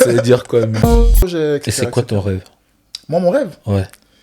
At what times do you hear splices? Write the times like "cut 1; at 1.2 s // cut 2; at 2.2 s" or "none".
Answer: cut 1; at 1.1 s

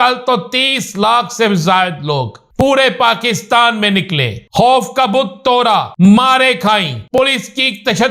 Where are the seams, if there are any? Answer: cut 1; at 2.4 s // cut 2; at 4.4 s // cut 3; at 5.9 s // cut 4; at 7.2 s

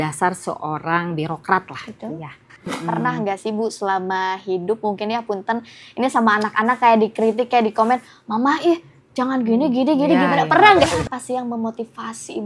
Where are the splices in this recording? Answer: cut 1; at 2.7 s // cut 2; at 10.8 s

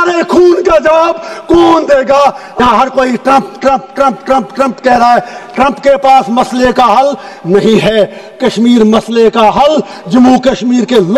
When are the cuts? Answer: cut 1; at 2.6 s

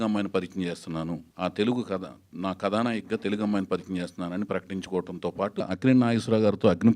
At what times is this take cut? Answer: cut 1; at 1.3 s // cut 2; at 5.7 s

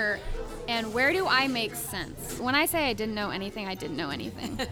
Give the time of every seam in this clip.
cut 1; at 2.4 s

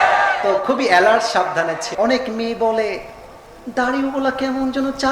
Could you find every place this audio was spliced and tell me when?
cut 1; at 1.9 s

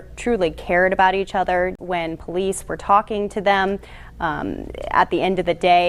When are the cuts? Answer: cut 1; at 1.8 s

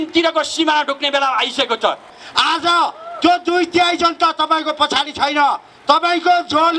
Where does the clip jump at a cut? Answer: cut 1; at 2.2 s

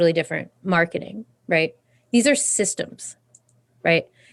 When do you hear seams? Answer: none

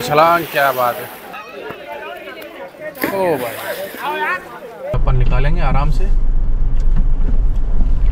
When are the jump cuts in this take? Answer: cut 1; at 1.3 s // cut 2; at 4.9 s

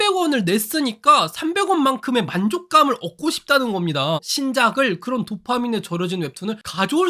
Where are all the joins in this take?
cut 1; at 4.2 s

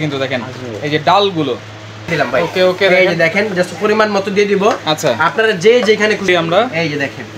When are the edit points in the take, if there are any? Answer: cut 1; at 2.1 s // cut 2; at 6.3 s

